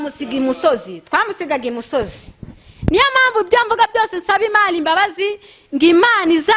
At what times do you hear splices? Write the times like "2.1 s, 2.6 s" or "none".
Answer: none